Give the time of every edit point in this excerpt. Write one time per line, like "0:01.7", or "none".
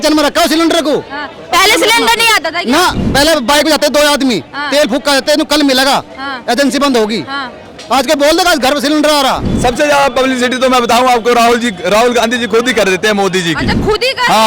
0:09.5